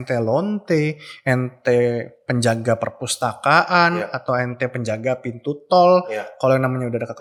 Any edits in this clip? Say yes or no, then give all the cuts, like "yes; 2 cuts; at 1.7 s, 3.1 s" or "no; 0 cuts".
no; 0 cuts